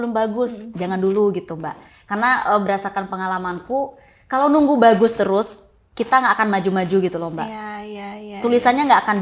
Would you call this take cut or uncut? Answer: uncut